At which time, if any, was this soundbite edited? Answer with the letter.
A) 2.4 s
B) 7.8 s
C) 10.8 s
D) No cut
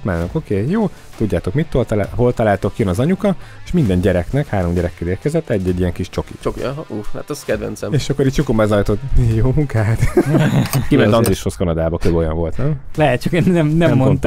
C